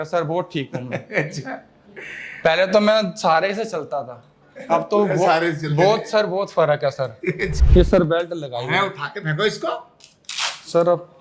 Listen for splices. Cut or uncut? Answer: cut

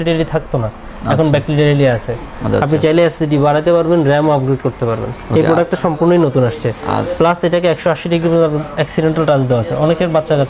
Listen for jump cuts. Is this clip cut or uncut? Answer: uncut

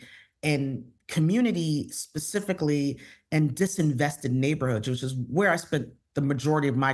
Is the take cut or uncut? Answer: uncut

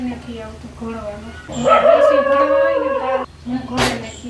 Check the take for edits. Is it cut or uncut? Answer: cut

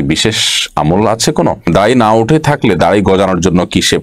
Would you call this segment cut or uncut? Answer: cut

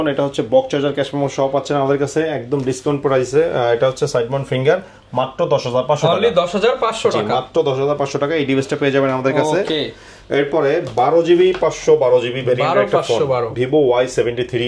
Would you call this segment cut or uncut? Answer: uncut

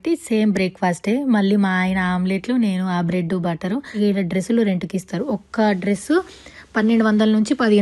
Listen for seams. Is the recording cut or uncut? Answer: cut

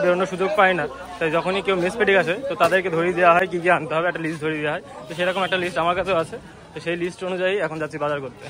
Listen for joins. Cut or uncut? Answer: uncut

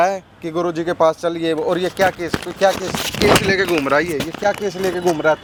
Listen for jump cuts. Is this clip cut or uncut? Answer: uncut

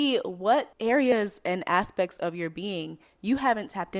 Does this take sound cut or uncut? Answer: uncut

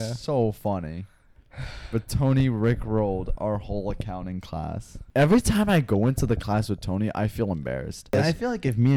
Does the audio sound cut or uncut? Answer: cut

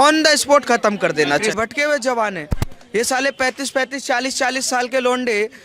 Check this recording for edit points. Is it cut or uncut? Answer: cut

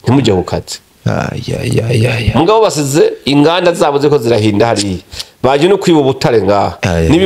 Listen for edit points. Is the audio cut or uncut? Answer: uncut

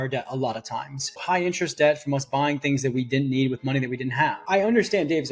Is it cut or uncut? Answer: cut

